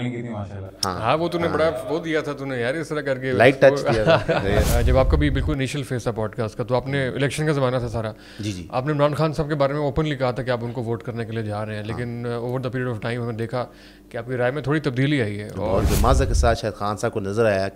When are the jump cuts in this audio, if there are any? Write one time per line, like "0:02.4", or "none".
0:04.7
0:15.8